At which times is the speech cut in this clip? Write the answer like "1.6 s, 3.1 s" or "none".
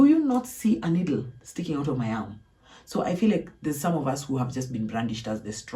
none